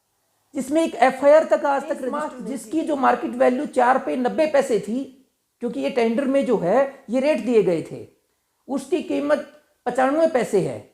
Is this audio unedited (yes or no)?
no